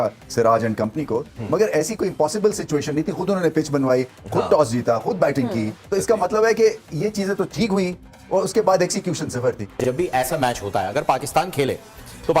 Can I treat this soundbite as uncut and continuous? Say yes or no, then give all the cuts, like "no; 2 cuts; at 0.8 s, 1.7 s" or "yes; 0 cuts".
no; 1 cut; at 9.7 s